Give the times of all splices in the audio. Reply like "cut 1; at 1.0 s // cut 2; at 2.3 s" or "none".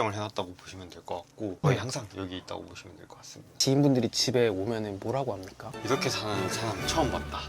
cut 1; at 1.6 s // cut 2; at 3.6 s